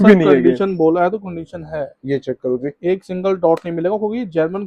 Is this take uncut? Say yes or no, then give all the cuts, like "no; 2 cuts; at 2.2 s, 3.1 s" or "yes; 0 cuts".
yes; 0 cuts